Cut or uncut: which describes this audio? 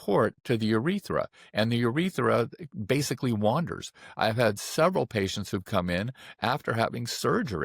uncut